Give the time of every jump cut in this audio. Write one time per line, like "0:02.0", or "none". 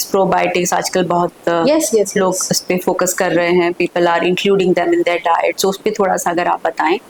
none